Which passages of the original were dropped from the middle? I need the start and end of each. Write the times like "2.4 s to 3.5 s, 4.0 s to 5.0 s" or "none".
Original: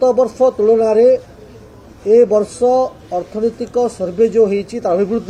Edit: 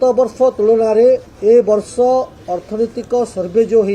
1.3 s to 1.9 s